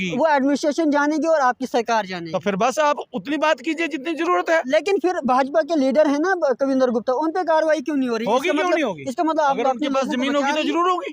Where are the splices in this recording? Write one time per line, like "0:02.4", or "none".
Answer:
none